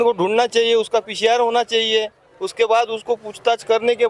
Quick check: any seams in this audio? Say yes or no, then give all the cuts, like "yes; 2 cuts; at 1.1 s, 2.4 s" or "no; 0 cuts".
no; 0 cuts